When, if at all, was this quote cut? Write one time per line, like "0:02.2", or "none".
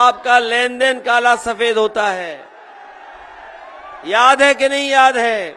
none